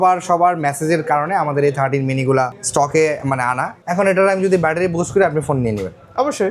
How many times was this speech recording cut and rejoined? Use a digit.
2